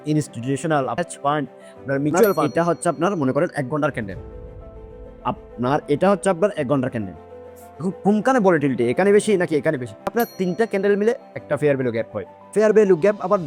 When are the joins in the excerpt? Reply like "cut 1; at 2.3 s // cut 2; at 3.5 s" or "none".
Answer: cut 1; at 0.9 s // cut 2; at 2.5 s // cut 3; at 10.1 s